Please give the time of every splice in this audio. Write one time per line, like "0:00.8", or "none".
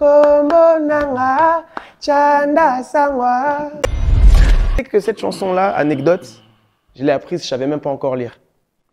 0:04.3